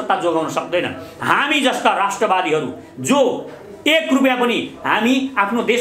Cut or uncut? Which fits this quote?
uncut